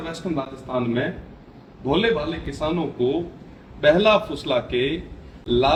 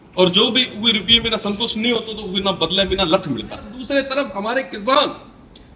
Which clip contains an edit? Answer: second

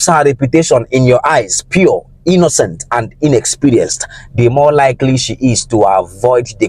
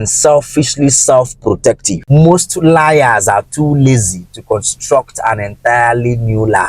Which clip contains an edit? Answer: second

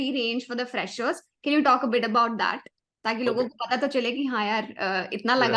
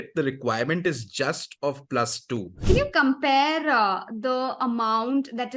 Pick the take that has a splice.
second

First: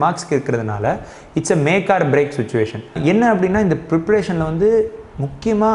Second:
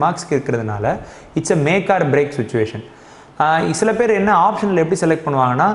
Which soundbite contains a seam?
first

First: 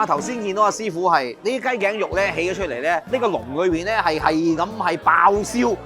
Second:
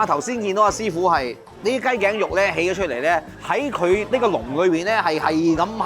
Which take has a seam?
first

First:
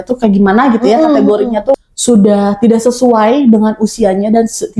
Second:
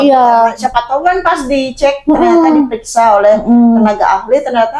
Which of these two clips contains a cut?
first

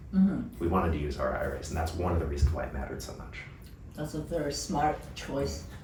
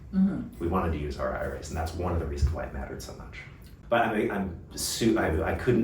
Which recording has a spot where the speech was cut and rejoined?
second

